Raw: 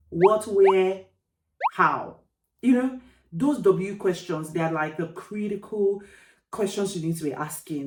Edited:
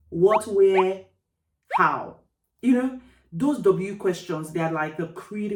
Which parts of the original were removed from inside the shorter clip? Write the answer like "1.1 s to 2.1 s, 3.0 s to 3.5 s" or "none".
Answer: none